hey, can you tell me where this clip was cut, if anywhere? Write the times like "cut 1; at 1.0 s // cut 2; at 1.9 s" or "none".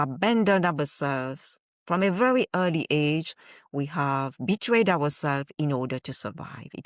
none

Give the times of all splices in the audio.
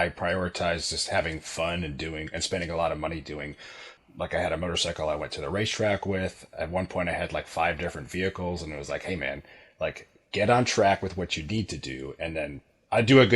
cut 1; at 3.9 s

